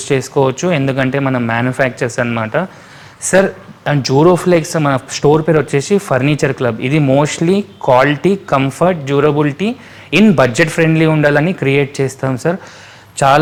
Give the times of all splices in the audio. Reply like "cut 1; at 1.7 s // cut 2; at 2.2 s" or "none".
none